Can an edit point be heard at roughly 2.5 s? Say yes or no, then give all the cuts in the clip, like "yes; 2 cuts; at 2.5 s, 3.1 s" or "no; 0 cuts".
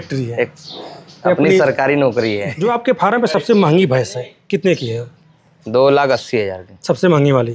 yes; 1 cut; at 2.5 s